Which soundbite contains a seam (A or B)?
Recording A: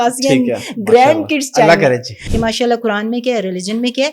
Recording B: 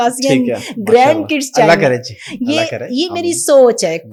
A